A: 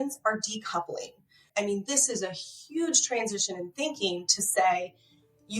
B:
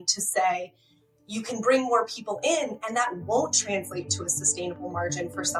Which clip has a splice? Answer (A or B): A